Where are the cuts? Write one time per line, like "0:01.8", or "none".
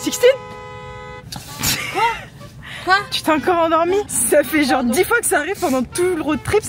0:04.1